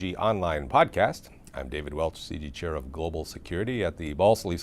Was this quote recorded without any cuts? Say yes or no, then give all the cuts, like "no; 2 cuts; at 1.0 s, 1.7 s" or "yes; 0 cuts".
no; 1 cut; at 1.5 s